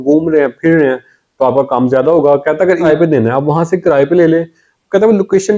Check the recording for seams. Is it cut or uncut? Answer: cut